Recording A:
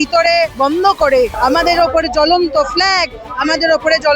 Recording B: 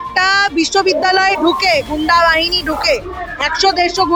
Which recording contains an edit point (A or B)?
A